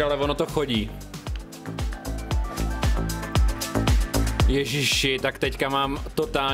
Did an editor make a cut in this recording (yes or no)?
no